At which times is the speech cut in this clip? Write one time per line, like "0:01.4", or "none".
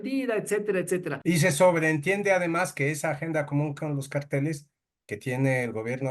0:01.1

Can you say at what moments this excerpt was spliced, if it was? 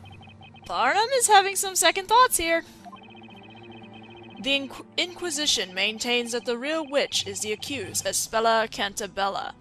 0:06.2

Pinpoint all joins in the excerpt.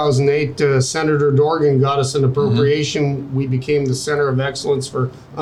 none

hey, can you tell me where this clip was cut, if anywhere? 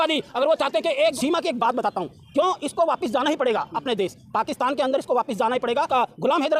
0:01.1
0:05.9

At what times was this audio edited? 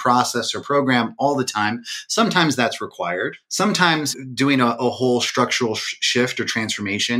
0:03.4
0:04.1

